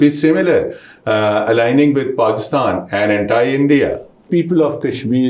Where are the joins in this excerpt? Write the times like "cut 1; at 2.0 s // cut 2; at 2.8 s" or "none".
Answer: cut 1; at 4.2 s